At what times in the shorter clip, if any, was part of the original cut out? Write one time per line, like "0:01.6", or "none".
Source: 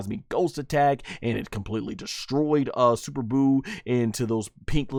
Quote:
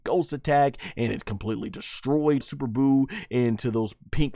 0:02.5